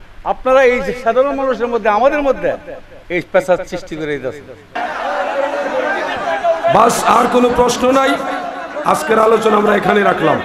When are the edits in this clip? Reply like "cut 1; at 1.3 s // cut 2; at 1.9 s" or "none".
cut 1; at 4.7 s